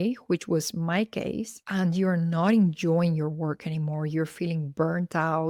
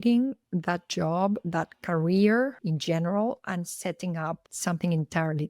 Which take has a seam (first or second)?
second